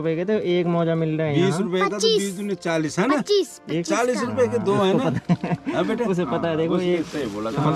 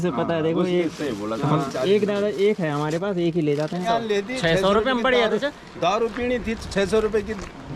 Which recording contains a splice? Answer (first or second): second